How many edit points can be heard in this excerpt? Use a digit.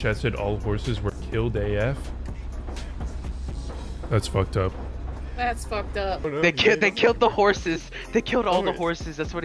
1